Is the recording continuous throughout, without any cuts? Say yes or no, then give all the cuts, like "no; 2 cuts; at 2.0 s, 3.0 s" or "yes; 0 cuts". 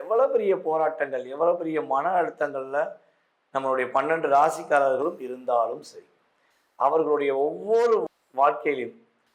yes; 0 cuts